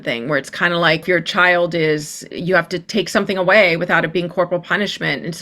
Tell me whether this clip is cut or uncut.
cut